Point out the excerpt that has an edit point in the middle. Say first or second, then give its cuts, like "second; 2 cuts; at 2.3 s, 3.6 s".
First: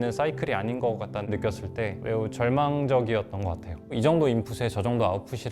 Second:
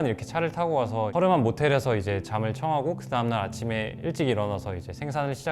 first; 2 cuts; at 1.3 s, 3.7 s